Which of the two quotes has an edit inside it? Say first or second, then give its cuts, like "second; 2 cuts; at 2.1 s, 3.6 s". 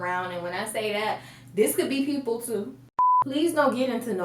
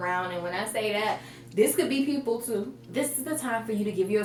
first; 1 cut; at 2.8 s